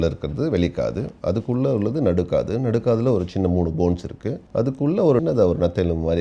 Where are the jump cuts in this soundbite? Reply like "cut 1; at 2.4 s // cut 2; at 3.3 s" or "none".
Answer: cut 1; at 5.2 s